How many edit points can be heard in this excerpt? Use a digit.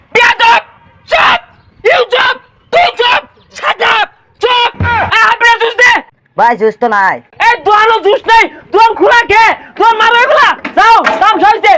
2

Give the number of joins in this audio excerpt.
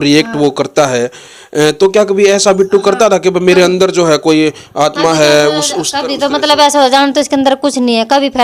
0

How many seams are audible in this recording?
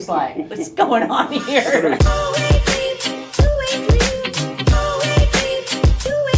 1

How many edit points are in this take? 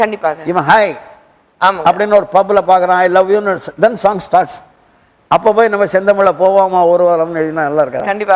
0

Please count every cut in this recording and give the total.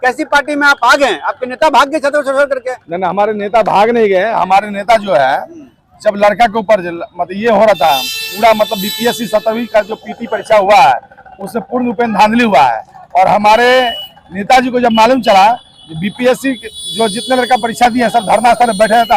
0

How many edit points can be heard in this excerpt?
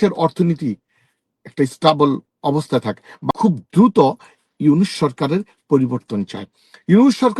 1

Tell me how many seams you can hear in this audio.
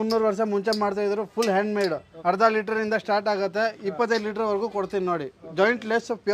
1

